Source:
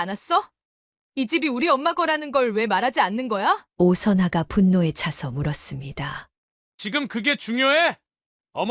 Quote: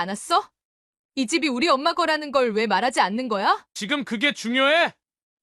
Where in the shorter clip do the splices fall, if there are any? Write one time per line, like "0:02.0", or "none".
0:03.7

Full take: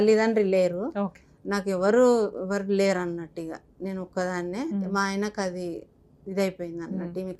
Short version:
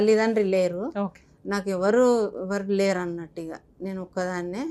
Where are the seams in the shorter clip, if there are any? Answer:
none

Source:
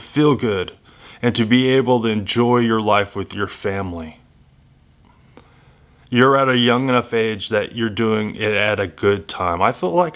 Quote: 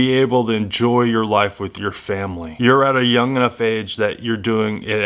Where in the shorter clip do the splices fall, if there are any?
0:02.4

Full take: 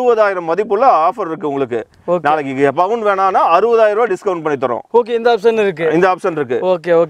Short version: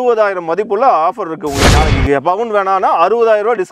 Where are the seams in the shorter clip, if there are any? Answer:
0:01.7

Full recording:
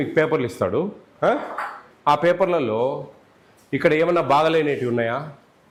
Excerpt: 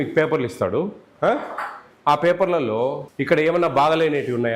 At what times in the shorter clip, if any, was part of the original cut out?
0:03.1

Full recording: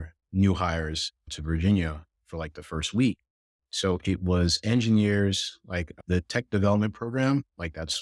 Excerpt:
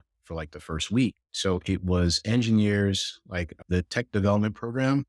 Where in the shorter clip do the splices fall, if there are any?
0:01.3

